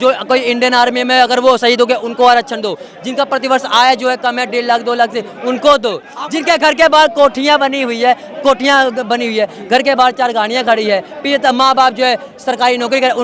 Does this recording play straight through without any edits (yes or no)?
yes